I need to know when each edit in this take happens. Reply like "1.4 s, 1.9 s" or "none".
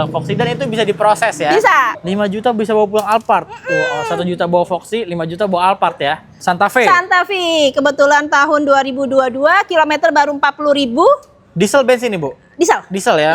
2.0 s, 6.3 s